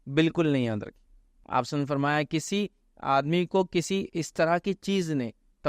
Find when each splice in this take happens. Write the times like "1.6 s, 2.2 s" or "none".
1.4 s